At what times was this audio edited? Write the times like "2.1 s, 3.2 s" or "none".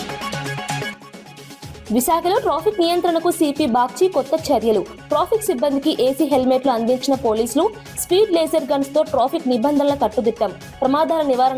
0.9 s